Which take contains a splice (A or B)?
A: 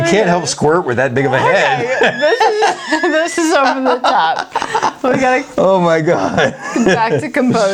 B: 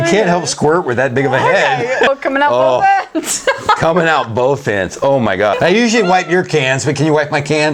B